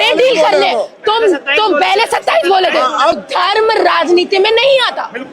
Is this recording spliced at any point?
yes; 1 cut; at 3.2 s

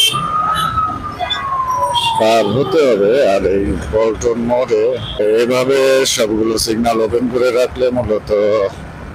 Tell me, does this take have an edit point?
yes; 1 cut; at 5.2 s

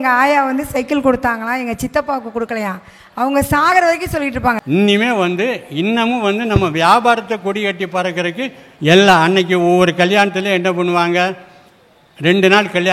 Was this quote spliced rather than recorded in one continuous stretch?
yes; 1 cut; at 4.6 s

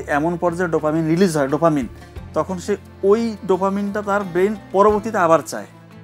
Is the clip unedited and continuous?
yes; 0 cuts

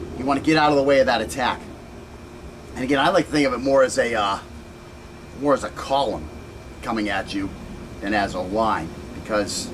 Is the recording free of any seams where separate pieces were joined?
yes; 0 cuts

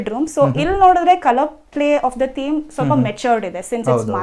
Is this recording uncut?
yes; 0 cuts

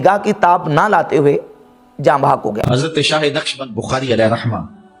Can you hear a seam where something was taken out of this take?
yes; 1 cut; at 2.6 s

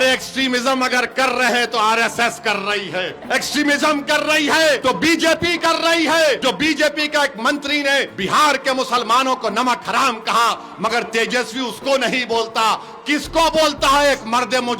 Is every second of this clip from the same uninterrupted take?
no; 4 cuts; at 3.2 s, 4.8 s, 6.4 s, 8.1 s

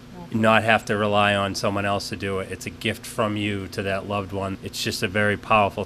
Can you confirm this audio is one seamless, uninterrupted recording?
no; 1 cut; at 4.5 s

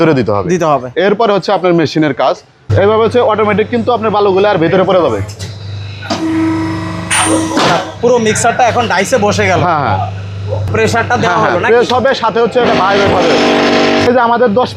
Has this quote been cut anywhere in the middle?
yes; 3 cuts; at 2.5 s, 10.7 s, 14.0 s

